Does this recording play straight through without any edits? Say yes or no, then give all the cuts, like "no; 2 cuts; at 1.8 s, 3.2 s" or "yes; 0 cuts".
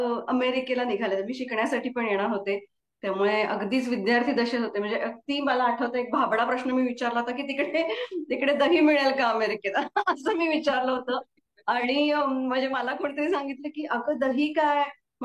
yes; 0 cuts